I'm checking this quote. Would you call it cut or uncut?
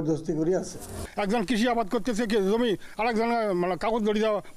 cut